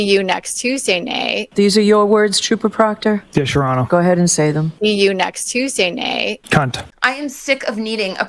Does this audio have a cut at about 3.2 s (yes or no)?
no